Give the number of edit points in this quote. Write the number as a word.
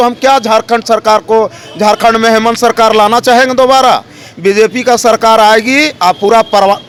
zero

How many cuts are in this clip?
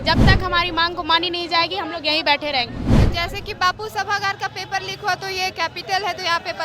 one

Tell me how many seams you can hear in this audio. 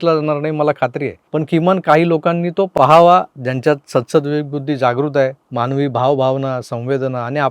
one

